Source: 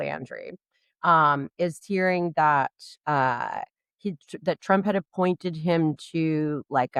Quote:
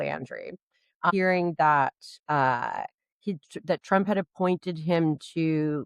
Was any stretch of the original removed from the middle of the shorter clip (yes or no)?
yes